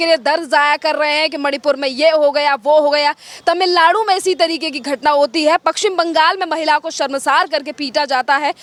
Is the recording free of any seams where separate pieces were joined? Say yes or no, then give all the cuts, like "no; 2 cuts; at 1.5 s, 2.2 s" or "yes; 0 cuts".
yes; 0 cuts